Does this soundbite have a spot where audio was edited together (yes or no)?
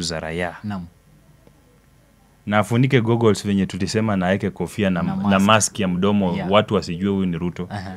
no